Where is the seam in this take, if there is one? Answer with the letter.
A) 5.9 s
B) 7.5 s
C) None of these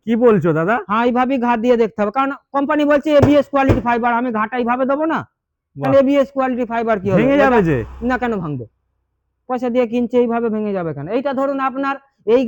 C